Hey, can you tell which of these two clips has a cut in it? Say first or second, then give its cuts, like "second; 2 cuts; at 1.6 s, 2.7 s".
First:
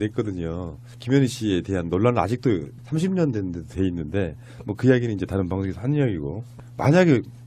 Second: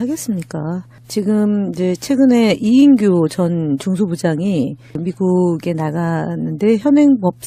first; 1 cut; at 5.0 s